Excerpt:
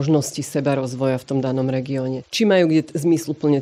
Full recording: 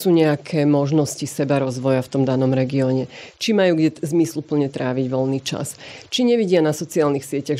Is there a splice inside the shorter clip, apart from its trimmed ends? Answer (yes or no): yes